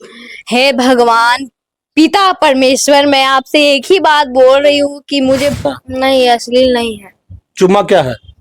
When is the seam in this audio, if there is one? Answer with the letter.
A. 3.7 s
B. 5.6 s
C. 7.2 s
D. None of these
B